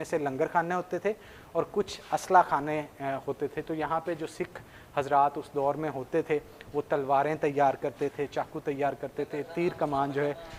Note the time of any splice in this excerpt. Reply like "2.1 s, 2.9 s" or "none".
none